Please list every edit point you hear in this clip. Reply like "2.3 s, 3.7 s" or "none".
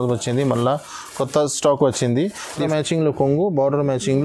2.6 s